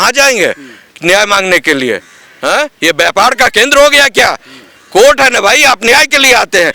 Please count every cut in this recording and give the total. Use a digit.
0